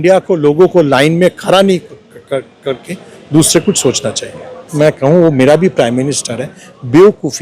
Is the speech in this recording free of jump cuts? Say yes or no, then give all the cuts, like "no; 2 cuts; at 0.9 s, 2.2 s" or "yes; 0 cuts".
no; 1 cut; at 4.7 s